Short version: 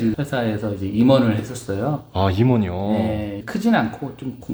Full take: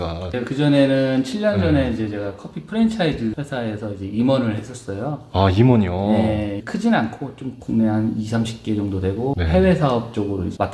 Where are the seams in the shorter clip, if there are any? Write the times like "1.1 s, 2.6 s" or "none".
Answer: none